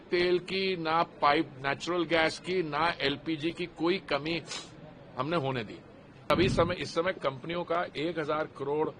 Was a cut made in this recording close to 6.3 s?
yes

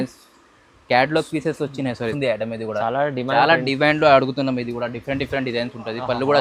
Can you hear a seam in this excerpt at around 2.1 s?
yes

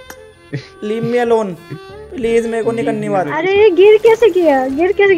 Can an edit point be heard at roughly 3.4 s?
yes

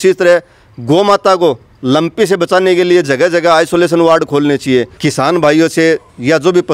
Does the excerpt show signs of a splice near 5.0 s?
yes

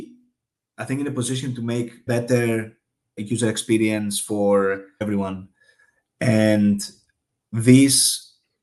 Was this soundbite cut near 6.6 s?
no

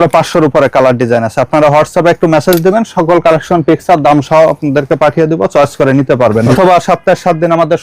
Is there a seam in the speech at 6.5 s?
yes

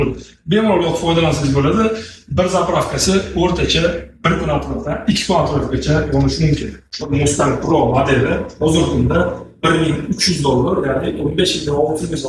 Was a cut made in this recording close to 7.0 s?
yes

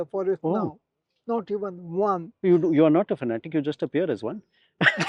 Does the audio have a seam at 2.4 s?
yes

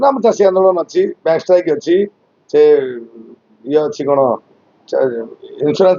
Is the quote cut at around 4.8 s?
no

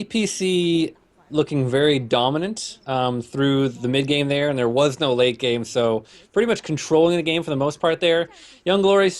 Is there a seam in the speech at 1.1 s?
no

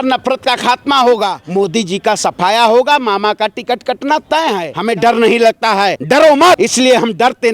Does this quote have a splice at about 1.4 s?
yes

